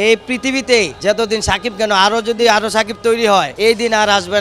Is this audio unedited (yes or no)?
no